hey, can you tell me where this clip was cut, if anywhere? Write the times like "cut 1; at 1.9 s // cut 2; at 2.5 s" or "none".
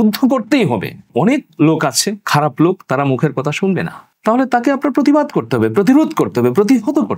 none